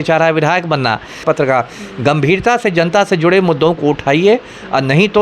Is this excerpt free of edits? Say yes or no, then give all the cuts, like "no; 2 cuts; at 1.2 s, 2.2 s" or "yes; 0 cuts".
no; 1 cut; at 1.2 s